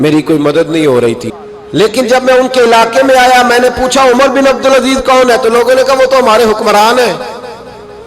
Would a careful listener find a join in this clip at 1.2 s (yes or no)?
yes